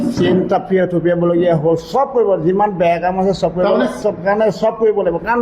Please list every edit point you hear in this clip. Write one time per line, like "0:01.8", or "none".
0:04.0